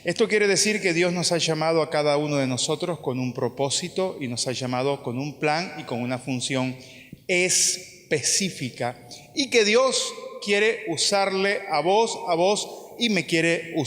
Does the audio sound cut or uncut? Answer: cut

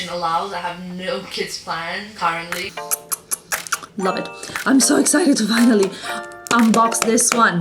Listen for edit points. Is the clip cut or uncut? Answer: cut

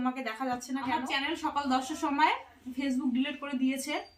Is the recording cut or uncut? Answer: cut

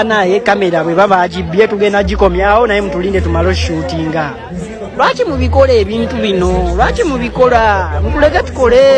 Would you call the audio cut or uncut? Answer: uncut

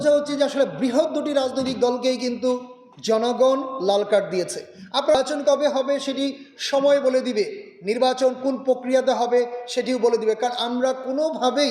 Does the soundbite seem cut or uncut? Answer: cut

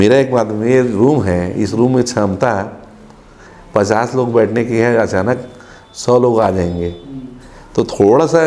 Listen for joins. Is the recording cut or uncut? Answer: uncut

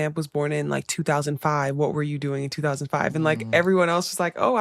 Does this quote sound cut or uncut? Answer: uncut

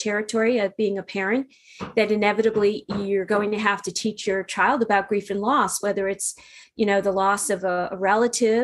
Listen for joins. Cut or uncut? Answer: uncut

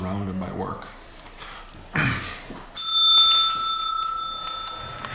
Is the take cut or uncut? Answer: uncut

